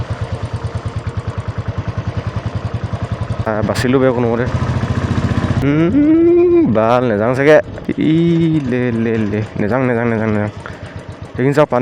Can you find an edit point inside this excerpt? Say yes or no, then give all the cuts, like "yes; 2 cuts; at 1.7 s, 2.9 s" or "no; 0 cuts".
yes; 3 cuts; at 3.5 s, 5.6 s, 7.9 s